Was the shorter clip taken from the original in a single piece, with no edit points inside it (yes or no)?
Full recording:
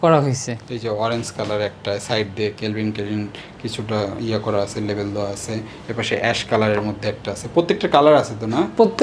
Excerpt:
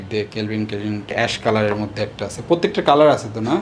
no